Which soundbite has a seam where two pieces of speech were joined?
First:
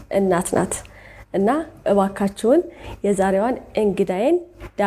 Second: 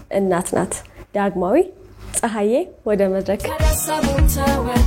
second; 2 cuts; at 1.0 s, 3.5 s

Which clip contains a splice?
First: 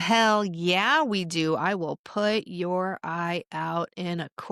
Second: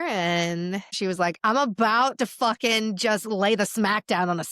second; 1 cut; at 1.0 s

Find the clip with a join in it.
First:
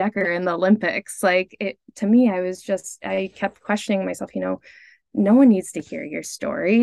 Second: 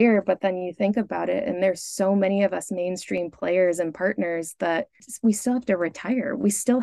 second; 1 cut; at 5.1 s

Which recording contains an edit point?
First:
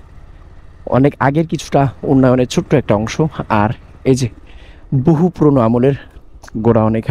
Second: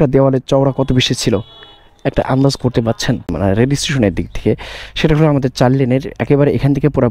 second; 1 cut; at 3.3 s

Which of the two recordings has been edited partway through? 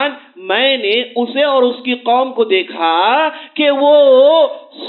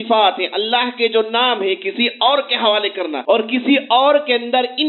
second; 1 cut; at 3.2 s

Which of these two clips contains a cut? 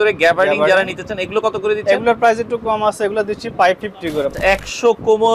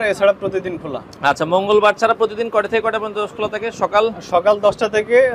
first; 1 cut; at 4.3 s

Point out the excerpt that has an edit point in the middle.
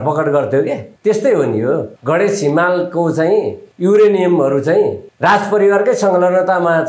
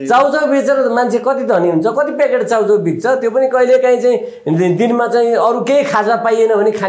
first; 4 cuts; at 0.9 s, 1.9 s, 3.6 s, 5.1 s

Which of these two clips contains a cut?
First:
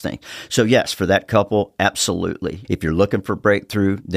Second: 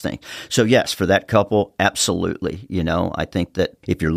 first; 1 cut; at 2.6 s

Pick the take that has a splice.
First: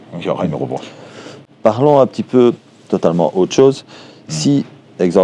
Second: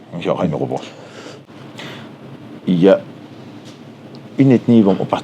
second; 1 cut; at 1.5 s

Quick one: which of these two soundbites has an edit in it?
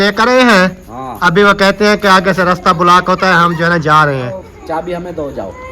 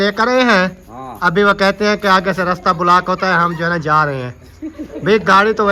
first; 1 cut; at 4.5 s

